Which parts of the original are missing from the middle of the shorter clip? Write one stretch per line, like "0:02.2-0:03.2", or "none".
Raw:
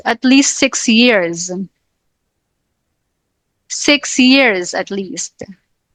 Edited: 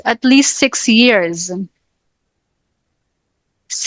none